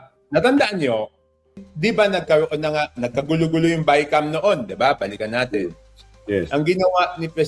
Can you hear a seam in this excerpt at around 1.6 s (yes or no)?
yes